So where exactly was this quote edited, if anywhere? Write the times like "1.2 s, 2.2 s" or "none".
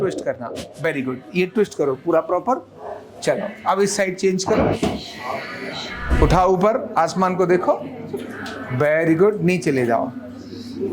6.1 s